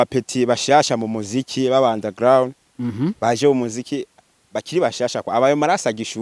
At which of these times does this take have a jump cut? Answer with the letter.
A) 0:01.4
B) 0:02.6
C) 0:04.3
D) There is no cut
D